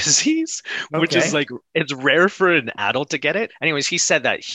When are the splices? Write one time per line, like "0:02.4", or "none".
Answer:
0:03.5